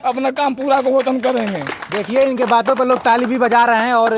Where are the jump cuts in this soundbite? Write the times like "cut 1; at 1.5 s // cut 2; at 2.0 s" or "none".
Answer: none